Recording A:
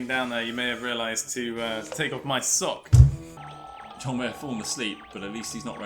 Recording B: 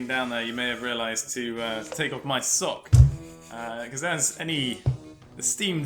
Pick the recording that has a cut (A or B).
A